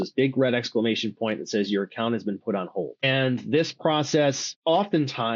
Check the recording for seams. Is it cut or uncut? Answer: cut